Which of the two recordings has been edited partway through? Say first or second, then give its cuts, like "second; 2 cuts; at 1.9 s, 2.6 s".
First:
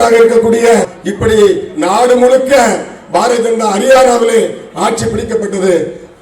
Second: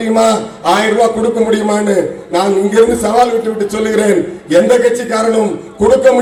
first; 1 cut; at 1.0 s